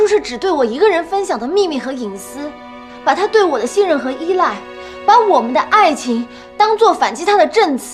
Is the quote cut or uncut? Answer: uncut